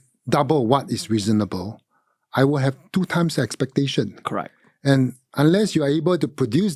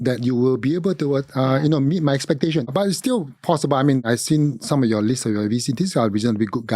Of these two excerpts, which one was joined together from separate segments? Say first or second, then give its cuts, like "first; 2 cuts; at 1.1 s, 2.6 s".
second; 2 cuts; at 2.7 s, 4.0 s